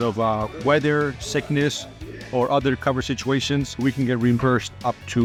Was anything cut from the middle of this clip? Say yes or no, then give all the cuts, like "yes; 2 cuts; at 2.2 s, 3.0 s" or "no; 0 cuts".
no; 0 cuts